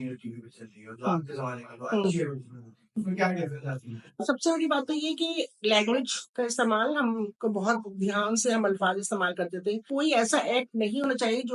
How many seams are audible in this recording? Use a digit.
3